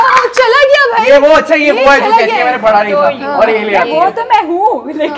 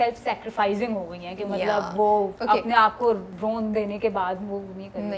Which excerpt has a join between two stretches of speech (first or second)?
second